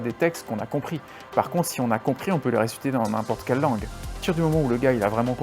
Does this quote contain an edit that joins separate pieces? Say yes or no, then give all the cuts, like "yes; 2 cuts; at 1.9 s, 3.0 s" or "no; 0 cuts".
yes; 1 cut; at 4.2 s